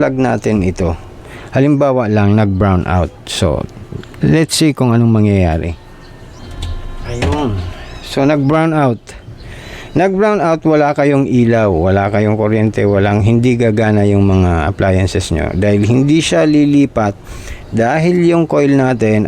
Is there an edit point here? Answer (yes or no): yes